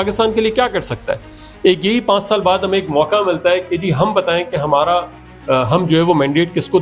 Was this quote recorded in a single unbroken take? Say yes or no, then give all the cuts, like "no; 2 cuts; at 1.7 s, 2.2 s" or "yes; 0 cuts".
yes; 0 cuts